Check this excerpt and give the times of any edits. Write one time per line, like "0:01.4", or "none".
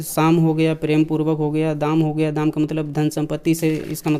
none

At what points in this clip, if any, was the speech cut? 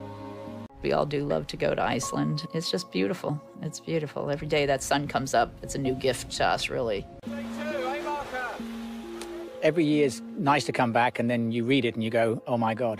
0:01.3

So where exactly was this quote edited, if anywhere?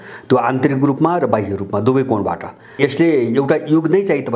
0:02.8

